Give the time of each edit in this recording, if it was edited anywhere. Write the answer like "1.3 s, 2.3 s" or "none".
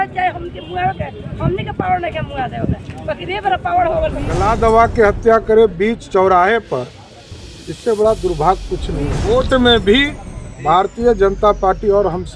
4.3 s, 9.2 s